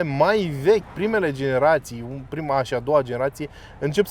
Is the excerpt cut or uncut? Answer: uncut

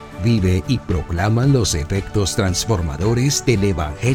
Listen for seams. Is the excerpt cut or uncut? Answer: uncut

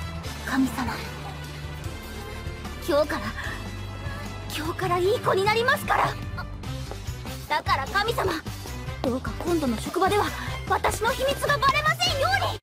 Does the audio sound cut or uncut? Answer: uncut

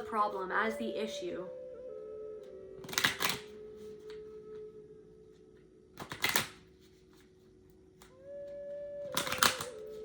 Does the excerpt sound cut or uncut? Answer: cut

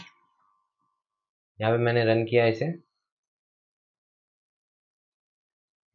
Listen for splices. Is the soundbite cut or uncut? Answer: uncut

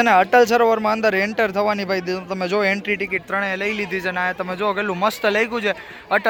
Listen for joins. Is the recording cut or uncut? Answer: uncut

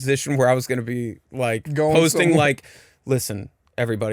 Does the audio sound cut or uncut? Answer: uncut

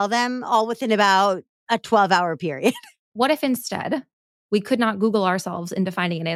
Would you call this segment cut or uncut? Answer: cut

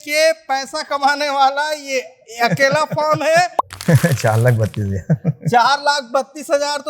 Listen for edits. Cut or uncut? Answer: cut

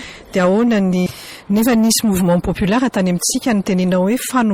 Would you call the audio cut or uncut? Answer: cut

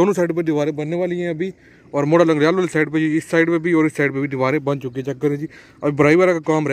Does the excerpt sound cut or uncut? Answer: uncut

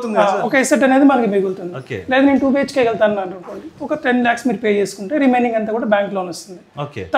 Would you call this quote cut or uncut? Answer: uncut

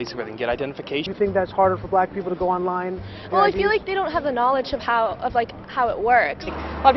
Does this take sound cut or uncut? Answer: cut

